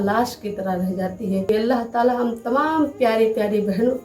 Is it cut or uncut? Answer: cut